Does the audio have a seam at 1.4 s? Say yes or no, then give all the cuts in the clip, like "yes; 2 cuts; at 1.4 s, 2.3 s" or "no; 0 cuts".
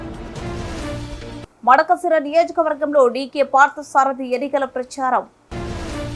yes; 1 cut; at 1.4 s